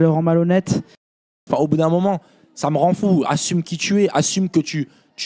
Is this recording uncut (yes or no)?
no